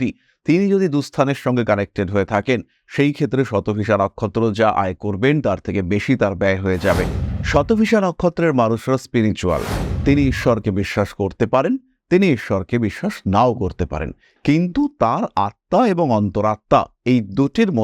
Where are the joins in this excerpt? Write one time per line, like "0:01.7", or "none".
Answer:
0:07.2